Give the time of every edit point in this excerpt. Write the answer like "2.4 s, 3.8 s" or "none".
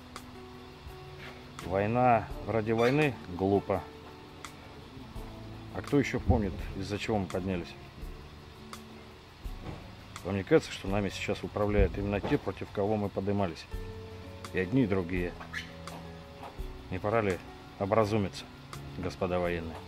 12.6 s